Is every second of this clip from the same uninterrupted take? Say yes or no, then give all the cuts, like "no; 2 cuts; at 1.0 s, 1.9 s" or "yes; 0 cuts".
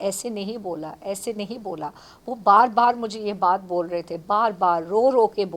yes; 0 cuts